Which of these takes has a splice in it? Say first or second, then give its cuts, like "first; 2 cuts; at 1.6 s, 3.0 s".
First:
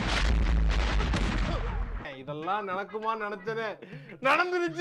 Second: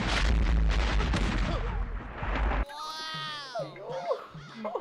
first; 1 cut; at 2.1 s